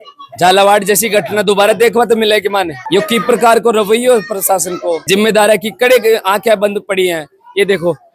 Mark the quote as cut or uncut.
uncut